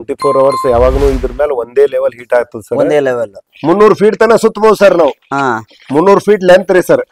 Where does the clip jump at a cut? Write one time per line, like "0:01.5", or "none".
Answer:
0:03.4